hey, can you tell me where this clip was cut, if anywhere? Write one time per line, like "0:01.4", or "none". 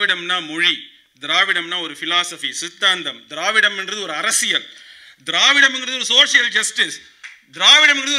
none